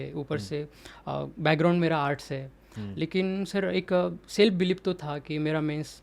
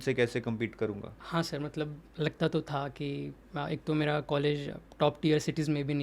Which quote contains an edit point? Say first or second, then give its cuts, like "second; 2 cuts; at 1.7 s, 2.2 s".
second; 1 cut; at 1.1 s